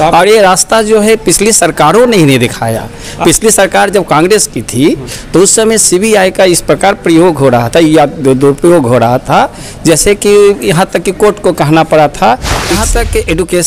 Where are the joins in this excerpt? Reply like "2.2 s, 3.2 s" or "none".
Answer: 12.7 s